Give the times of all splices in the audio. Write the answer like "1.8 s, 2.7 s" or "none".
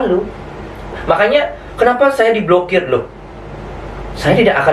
1.0 s